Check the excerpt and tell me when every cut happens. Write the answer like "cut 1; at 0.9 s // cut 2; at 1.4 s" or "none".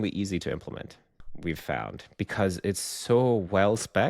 cut 1; at 1.3 s